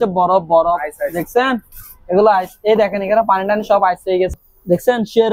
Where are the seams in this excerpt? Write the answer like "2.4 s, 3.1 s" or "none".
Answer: 4.3 s